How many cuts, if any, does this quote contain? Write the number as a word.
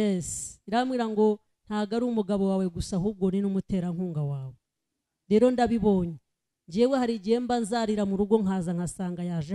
zero